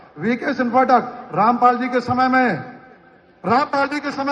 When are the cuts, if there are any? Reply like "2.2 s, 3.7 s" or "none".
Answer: none

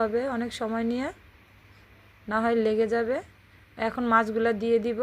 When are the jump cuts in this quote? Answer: 4.0 s

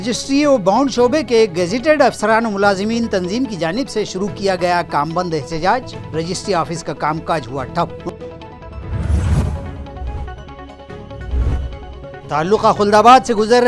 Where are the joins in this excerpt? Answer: none

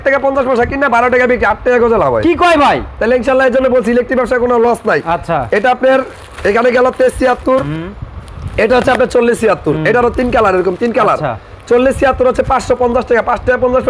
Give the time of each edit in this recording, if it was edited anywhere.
none

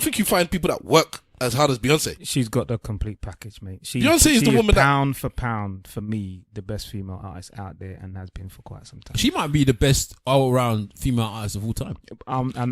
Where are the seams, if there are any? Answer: 2.2 s

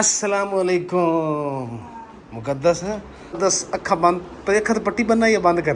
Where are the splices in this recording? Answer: 3.4 s

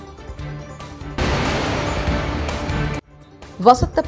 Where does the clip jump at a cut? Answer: none

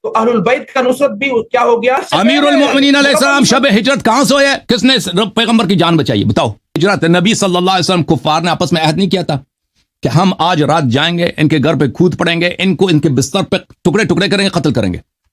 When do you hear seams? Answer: 2.0 s, 6.8 s

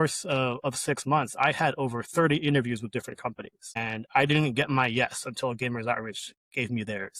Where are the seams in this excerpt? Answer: 3.8 s

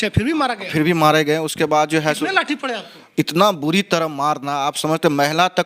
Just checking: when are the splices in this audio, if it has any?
3.0 s

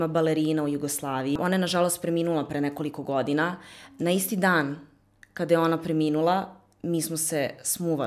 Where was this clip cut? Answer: 1.4 s

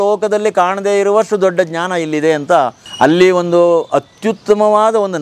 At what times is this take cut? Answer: 2.8 s

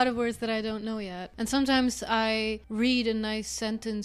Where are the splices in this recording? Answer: 1.3 s, 2.6 s

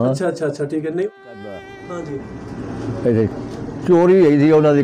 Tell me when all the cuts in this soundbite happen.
1.1 s

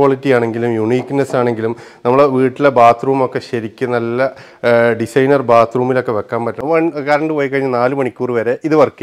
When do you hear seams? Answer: 6.6 s

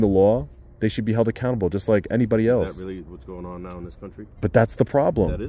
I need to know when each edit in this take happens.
4.4 s

